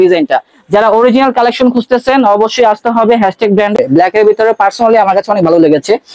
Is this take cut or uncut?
cut